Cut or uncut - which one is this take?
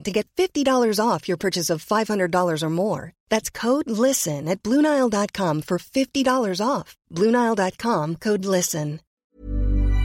cut